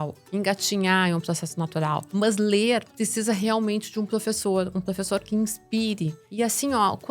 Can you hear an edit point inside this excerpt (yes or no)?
yes